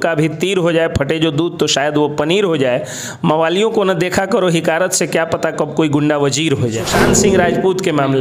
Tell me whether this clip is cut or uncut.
cut